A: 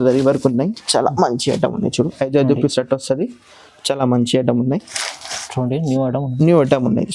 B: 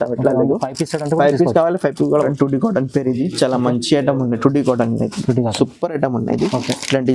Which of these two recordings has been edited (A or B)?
B